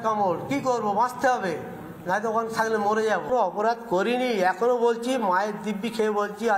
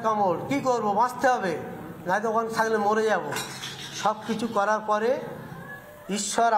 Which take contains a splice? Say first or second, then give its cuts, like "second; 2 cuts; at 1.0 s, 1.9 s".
first; 1 cut; at 3.3 s